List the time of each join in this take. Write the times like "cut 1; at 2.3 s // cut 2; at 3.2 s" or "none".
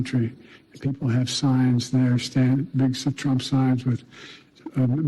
cut 1; at 0.9 s